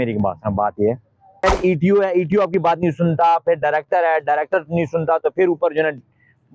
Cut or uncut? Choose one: cut